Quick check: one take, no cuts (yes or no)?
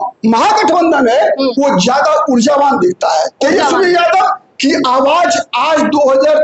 yes